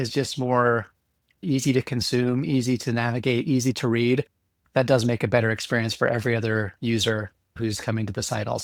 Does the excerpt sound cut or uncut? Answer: uncut